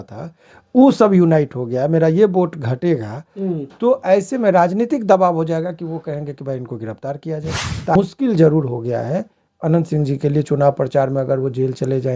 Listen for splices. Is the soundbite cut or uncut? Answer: cut